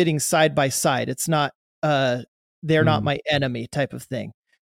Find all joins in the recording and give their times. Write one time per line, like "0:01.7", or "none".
none

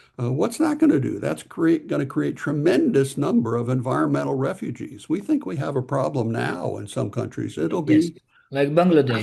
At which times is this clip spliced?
none

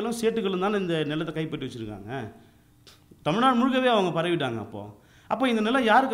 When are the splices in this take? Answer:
none

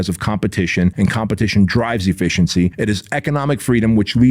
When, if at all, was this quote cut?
0:00.9
0:02.7

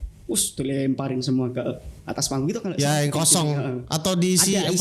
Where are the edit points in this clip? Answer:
0:02.7

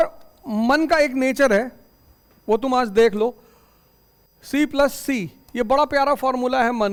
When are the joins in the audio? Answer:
none

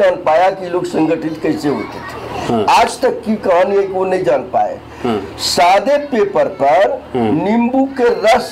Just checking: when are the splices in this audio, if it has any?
none

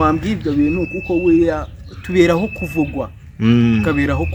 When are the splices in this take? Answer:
none

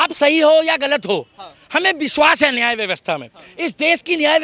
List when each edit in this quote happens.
none

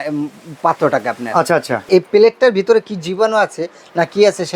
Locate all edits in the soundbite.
0:01.9

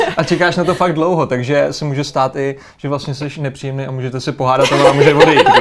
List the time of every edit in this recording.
none

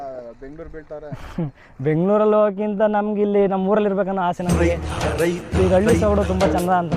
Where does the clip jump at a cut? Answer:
none

